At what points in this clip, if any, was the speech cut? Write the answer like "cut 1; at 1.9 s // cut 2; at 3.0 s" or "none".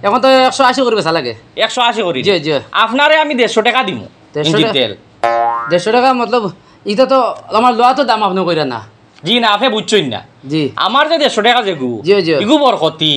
none